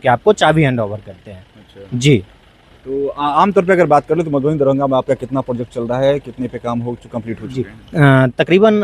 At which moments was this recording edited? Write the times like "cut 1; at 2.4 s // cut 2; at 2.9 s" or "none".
none

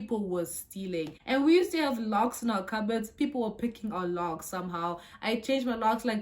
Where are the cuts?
cut 1; at 1.2 s

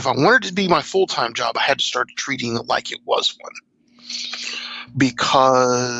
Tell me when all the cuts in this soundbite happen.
cut 1; at 4.8 s

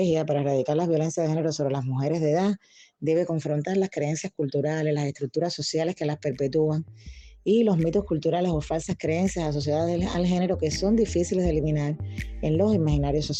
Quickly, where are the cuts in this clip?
none

